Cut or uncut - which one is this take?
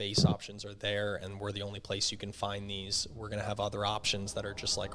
uncut